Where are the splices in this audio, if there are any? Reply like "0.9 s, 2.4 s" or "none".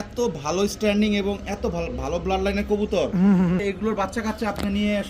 3.6 s